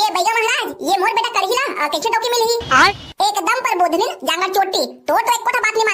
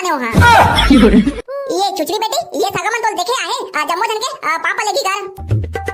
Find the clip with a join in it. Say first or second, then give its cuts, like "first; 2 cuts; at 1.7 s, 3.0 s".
second; 1 cut; at 1.4 s